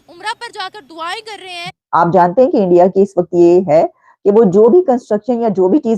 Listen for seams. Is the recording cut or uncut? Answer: cut